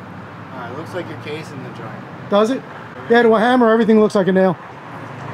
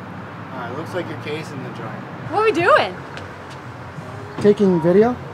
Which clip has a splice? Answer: second; 1 cut; at 2.2 s

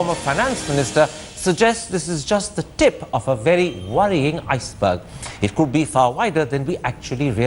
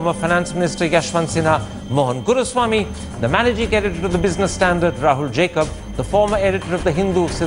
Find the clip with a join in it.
first; 1 cut; at 3.3 s

